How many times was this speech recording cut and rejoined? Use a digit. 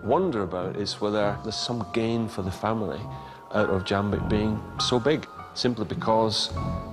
2